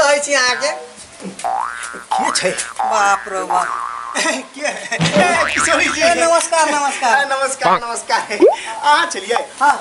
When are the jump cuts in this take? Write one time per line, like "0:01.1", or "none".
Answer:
none

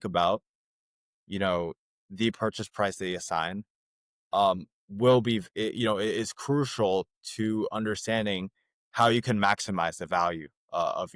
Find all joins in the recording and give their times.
none

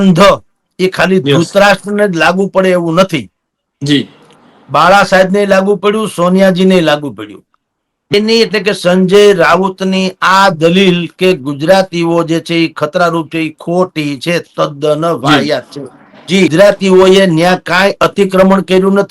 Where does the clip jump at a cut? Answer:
0:08.1
0:16.5

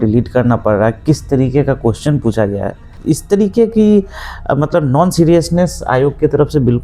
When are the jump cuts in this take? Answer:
0:02.9

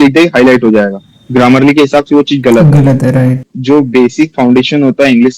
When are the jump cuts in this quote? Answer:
0:03.5

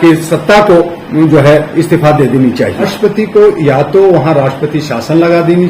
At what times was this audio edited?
0:02.9

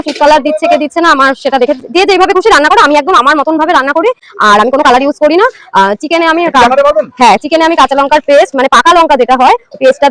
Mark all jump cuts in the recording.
none

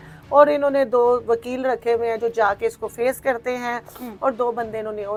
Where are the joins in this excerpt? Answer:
none

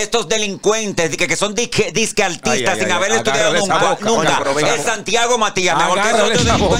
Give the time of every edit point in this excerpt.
none

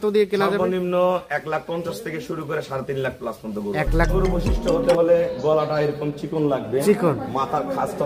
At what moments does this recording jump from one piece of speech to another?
0:04.1

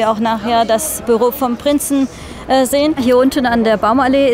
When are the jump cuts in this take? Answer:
0:03.0

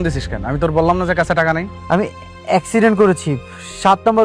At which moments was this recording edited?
0:01.7

